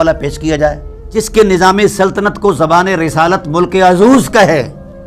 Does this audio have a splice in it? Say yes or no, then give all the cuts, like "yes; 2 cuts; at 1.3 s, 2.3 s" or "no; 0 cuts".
yes; 1 cut; at 0.9 s